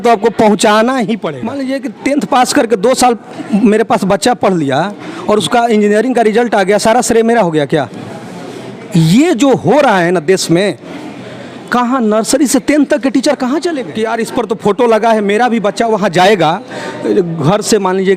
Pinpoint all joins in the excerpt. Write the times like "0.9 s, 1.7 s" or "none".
1.5 s, 13.9 s